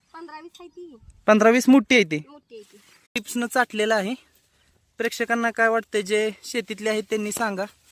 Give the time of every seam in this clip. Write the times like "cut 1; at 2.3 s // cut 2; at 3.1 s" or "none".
cut 1; at 3.0 s